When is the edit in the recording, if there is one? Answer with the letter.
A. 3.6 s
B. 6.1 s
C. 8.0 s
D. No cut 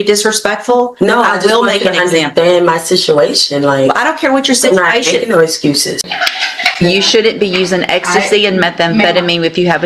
B